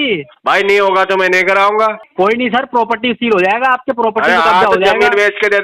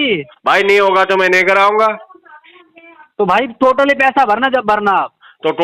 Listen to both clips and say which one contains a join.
first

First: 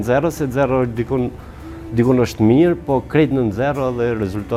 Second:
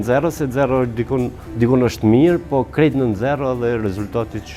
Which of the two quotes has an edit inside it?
second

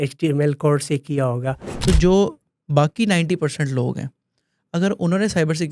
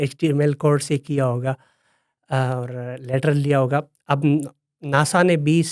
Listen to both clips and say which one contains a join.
first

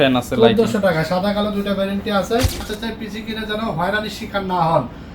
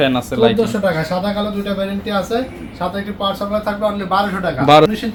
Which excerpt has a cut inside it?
first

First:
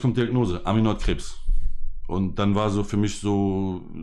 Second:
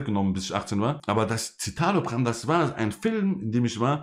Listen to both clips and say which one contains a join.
second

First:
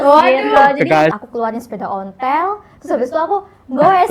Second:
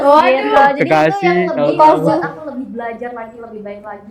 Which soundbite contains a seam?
first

